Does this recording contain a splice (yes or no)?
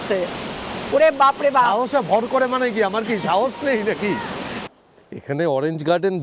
yes